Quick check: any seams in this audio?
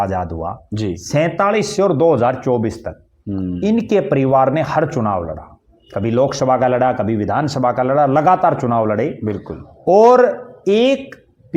no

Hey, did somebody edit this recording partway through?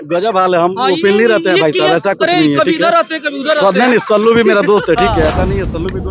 no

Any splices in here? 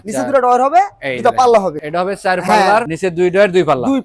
no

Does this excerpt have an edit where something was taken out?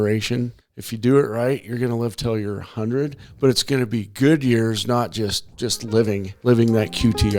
yes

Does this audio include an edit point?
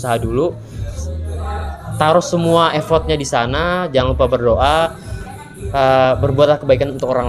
yes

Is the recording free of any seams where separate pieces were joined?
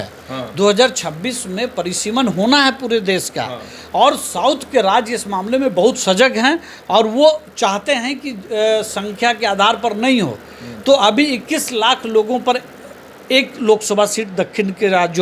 yes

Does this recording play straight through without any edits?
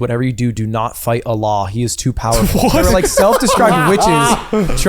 no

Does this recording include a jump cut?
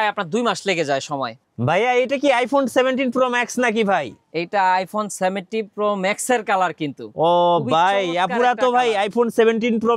yes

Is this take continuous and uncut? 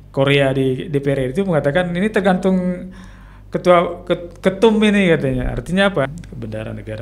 no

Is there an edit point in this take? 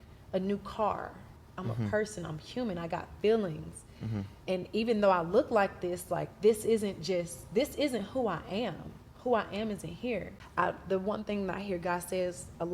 yes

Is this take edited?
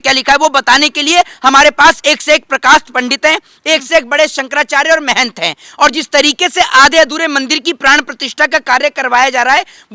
no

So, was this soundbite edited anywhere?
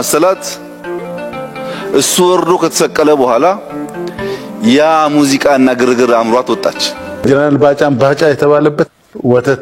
yes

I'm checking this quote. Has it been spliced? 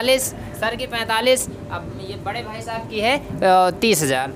no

